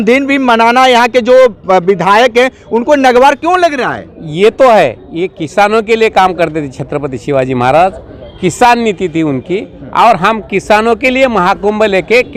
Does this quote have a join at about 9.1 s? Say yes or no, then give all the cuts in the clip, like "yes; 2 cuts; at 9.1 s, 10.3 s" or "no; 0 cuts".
no; 0 cuts